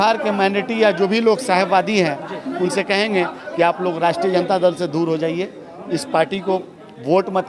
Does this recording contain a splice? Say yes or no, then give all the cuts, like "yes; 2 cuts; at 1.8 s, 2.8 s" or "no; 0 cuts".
no; 0 cuts